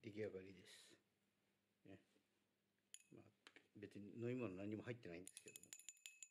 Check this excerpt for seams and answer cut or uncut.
uncut